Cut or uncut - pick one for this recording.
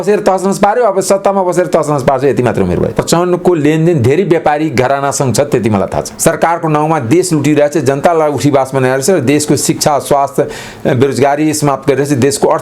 cut